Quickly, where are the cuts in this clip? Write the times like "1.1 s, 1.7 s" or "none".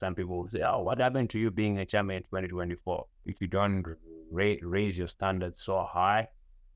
3.2 s